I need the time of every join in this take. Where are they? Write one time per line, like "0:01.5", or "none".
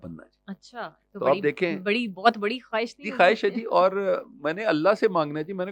none